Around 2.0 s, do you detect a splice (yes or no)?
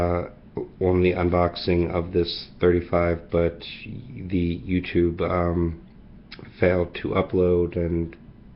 no